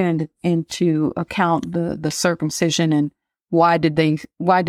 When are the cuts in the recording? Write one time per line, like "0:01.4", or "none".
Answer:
none